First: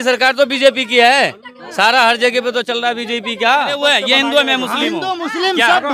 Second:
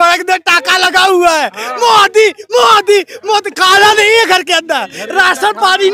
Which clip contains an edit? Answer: first; 1 cut; at 3.8 s

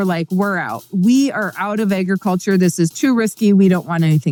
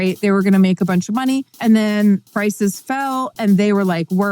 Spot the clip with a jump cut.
second; 2 cuts; at 1.5 s, 2.3 s

